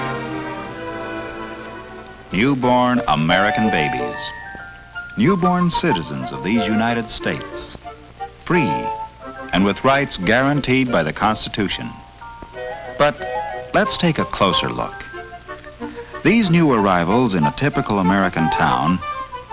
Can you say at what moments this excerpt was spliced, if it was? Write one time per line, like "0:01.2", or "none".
0:03.7